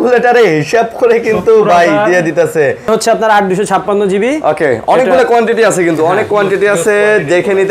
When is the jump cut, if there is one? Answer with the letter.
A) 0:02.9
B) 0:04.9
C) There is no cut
A